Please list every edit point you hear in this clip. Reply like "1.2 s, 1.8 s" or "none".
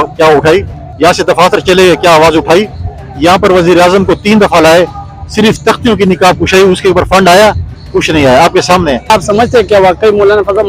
9.1 s